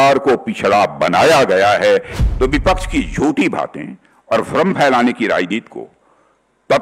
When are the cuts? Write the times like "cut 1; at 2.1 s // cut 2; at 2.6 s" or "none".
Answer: cut 1; at 2.2 s